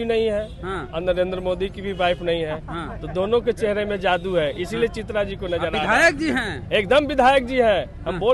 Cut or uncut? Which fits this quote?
uncut